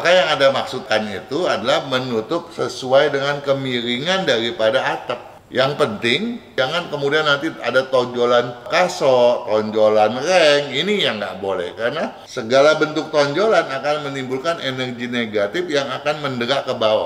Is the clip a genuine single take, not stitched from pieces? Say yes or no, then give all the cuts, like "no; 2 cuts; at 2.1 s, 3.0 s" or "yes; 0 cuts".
no; 4 cuts; at 5.3 s, 6.5 s, 8.6 s, 12.2 s